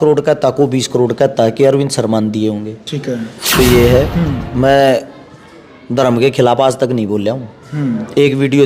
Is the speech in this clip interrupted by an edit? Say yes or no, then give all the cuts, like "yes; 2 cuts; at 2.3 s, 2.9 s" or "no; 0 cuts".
yes; 1 cut; at 3.6 s